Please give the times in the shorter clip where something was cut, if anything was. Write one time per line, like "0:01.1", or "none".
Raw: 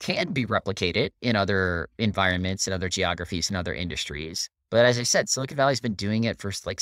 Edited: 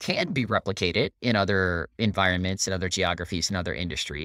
none